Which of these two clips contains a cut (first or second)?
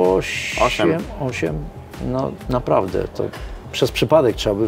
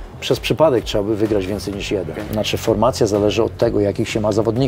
second